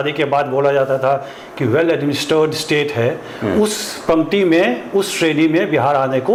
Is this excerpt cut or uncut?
uncut